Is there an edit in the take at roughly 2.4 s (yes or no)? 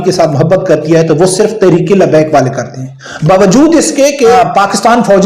no